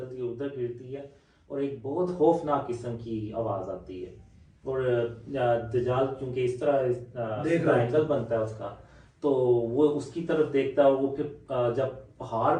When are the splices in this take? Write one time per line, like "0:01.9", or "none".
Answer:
none